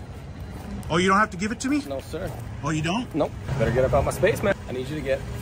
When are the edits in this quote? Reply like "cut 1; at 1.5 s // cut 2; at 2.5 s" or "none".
cut 1; at 3.4 s // cut 2; at 4.5 s